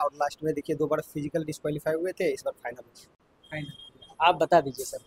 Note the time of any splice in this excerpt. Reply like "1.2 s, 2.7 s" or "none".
none